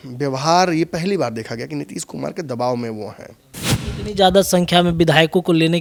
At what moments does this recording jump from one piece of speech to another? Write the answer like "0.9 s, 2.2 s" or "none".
none